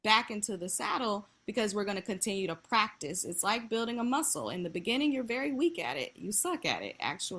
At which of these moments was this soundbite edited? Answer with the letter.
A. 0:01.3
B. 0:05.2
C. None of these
C